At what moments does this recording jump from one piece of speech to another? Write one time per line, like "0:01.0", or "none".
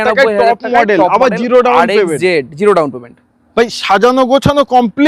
none

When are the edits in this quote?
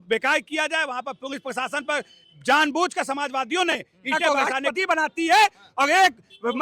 0:04.2

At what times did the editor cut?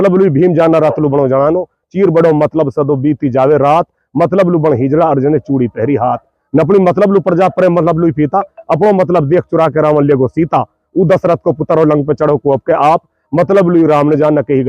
none

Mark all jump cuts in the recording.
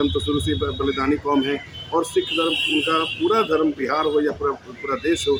none

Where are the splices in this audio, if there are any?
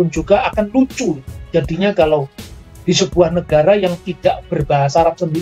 none

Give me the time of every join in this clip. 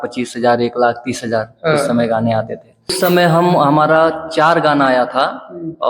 0:03.0

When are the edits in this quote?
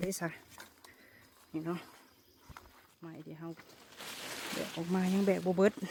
none

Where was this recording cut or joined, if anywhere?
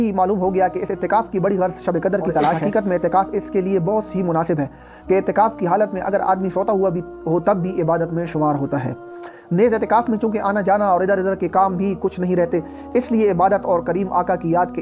none

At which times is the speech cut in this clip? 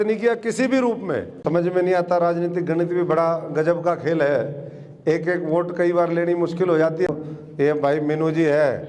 0:01.4
0:07.1

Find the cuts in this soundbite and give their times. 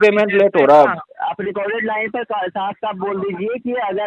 0:01.1

